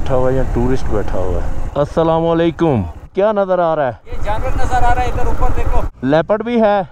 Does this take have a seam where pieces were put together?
yes; 3 cuts; at 1.6 s, 3.1 s, 5.8 s

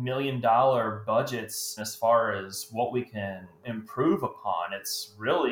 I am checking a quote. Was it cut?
yes; 1 cut; at 1.8 s

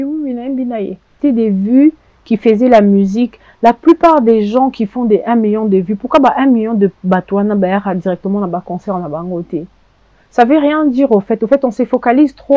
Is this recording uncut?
no; 1 cut; at 1.2 s

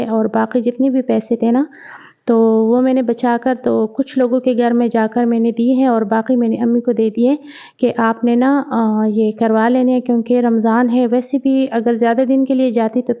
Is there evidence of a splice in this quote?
no; 0 cuts

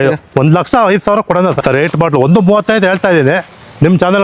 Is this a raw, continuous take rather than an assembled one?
no; 1 cut; at 1.6 s

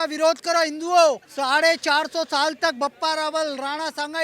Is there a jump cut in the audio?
yes; 1 cut; at 1.3 s

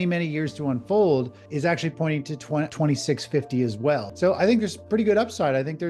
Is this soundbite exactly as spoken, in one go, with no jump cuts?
no; 3 cuts; at 1.4 s, 2.7 s, 4.1 s

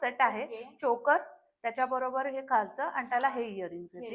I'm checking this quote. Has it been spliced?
no; 0 cuts

